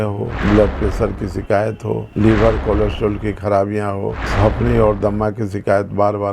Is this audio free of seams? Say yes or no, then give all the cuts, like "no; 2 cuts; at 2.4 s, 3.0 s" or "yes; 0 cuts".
yes; 0 cuts